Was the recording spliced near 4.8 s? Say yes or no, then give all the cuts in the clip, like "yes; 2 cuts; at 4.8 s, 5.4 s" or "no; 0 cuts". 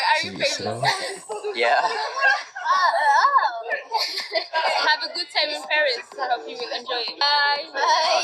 no; 1 cut; at 7.2 s